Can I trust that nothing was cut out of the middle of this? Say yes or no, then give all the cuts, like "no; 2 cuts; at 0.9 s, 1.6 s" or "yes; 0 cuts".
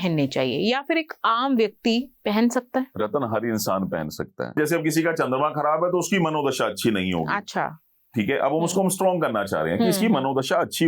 no; 2 cuts; at 2.9 s, 4.6 s